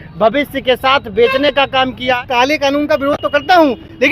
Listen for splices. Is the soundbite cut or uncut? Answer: cut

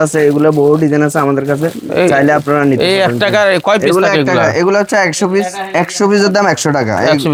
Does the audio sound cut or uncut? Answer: uncut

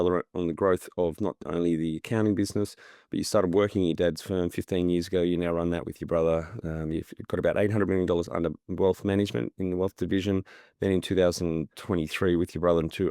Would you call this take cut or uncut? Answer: uncut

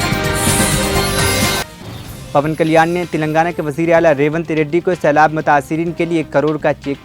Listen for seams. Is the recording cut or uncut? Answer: cut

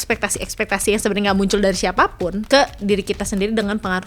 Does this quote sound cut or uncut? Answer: cut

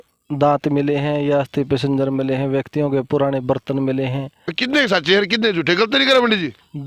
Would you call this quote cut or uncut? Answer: cut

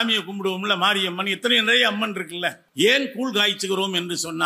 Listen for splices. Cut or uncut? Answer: cut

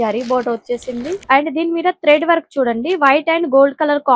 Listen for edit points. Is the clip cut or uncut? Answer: cut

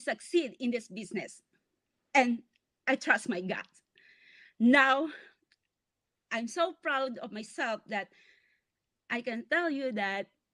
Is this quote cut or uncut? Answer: uncut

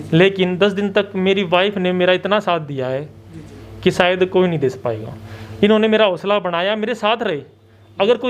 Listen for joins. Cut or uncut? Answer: uncut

